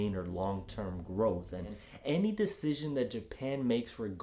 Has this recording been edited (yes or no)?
yes